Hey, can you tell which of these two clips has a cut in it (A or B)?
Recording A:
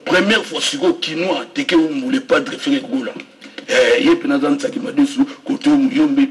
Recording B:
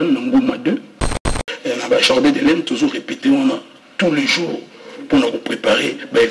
B